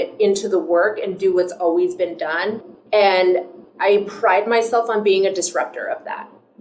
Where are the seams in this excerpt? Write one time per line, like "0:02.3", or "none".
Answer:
0:02.7
0:03.6